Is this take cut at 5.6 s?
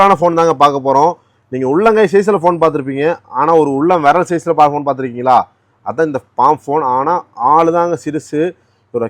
no; 0 cuts

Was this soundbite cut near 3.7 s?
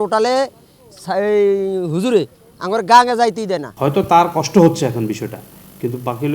yes; 1 cut; at 3.7 s

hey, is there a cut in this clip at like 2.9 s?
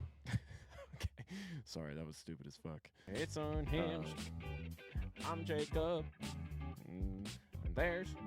yes; 1 cut; at 2.9 s

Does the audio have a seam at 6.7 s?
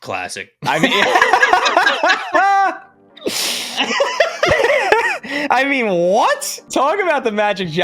yes; 1 cut; at 6.7 s

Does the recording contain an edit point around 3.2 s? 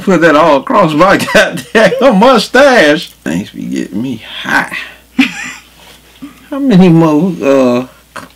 yes; 1 cut; at 3.2 s

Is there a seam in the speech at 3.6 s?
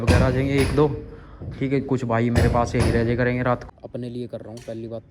yes; 1 cut; at 3.6 s

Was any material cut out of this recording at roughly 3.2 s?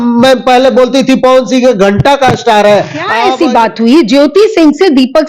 yes; 1 cut; at 3.2 s

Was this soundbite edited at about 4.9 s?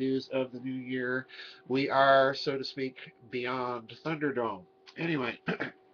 no; 1 cut; at 3.3 s

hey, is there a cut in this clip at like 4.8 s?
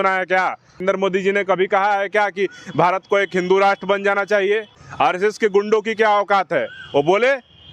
yes; 2 cuts; at 0.8 s, 4.8 s

